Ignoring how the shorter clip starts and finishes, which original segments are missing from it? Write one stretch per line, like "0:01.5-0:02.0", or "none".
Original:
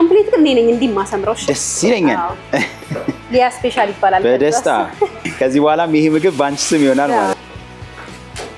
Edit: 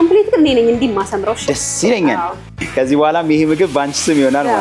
0:02.5-0:05.1

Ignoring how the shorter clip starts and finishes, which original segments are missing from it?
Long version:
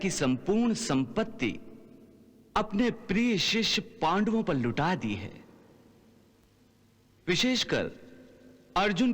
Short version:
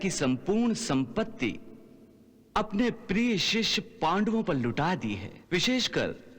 0:05.3-0:07.1

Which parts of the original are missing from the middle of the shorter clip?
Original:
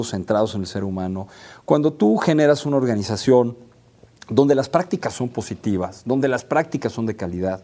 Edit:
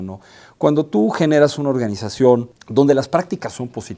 0:03.6-0:04.2

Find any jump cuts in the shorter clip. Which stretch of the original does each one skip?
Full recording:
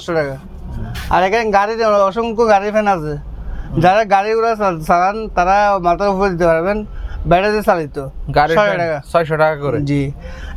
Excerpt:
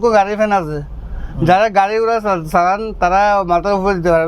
none

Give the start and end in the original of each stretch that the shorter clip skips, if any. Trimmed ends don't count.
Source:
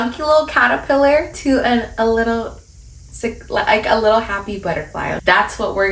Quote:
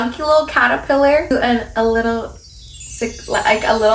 0:01.3-0:01.5

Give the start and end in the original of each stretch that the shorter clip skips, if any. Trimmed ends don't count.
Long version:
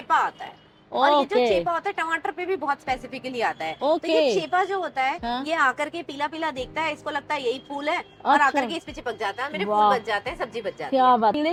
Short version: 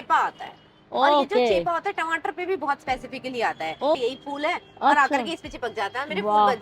0:04.0-0:07.4

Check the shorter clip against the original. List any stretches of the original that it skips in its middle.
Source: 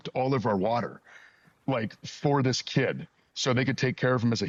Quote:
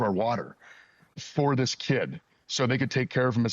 0:01.5-0:02.0

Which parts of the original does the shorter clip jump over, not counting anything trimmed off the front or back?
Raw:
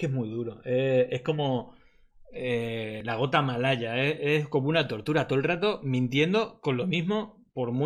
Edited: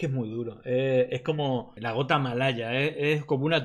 0:01.8-0:03.0

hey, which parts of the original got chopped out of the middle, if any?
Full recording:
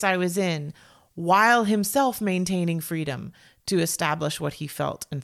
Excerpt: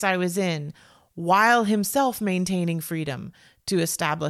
none

